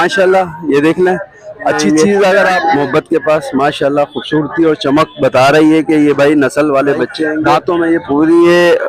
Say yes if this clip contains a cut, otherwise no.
yes